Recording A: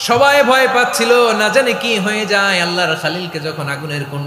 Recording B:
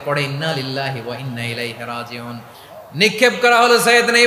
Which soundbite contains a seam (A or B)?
B